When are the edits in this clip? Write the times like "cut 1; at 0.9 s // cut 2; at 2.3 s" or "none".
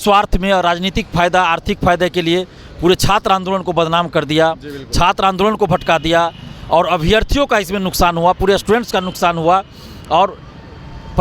none